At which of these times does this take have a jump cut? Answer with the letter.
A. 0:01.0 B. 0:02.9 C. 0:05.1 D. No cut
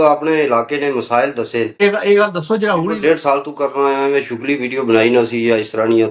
B